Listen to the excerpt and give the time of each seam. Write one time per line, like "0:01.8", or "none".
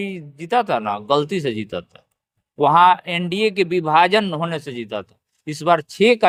none